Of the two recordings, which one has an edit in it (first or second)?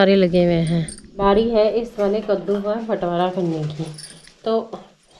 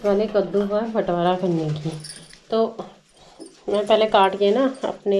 first